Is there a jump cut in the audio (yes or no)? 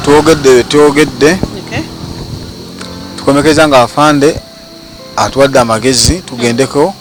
no